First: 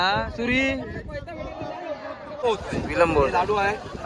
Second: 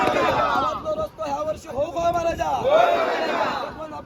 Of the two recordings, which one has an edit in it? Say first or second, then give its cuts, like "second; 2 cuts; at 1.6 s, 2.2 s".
first; 1 cut; at 2.4 s